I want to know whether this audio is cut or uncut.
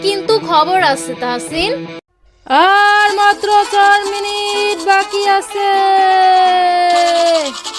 uncut